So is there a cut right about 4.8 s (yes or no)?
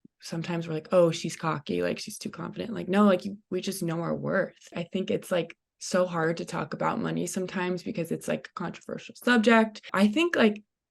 yes